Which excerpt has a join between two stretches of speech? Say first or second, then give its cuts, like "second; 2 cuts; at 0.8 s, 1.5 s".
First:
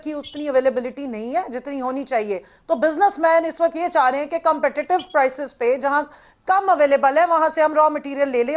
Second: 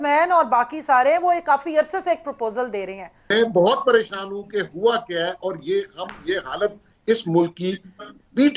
second; 1 cut; at 3.1 s